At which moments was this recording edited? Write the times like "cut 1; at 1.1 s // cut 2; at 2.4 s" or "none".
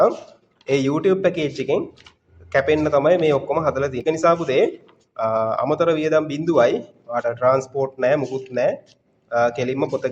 cut 1; at 4.0 s